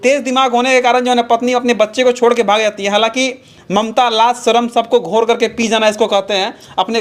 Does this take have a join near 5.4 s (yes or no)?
no